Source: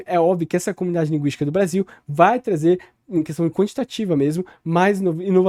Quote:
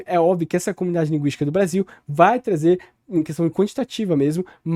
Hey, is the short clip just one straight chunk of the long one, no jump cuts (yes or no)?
yes